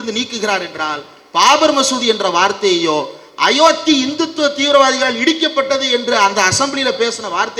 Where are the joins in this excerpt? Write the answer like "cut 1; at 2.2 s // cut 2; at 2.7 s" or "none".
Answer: none